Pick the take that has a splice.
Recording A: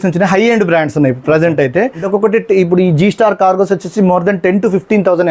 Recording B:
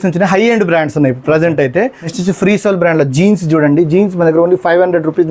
B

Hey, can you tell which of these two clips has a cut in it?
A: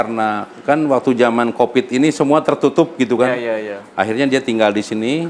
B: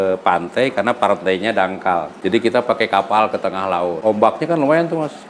B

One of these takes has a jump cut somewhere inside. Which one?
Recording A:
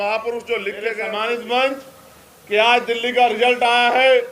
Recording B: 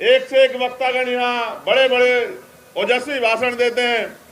A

